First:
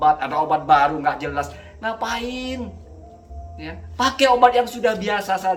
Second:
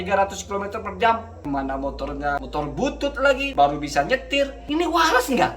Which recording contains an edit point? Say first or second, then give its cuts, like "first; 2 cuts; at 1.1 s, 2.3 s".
second; 4 cuts; at 1.3 s, 2.4 s, 3.5 s, 4.6 s